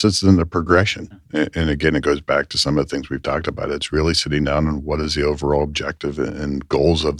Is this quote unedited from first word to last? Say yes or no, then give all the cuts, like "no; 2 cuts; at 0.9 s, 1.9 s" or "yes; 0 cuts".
no; 1 cut; at 1.3 s